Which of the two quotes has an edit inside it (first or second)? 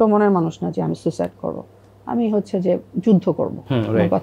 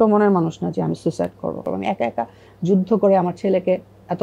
second